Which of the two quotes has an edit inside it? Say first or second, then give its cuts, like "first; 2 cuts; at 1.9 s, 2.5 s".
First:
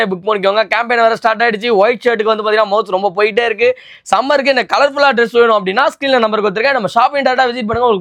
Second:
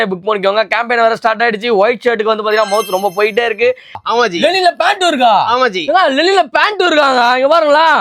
second; 1 cut; at 4.0 s